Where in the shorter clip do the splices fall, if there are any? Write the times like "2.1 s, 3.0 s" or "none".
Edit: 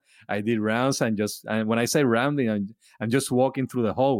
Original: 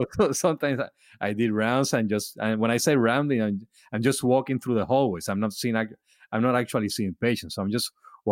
none